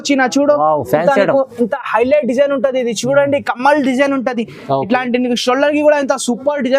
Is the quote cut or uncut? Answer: uncut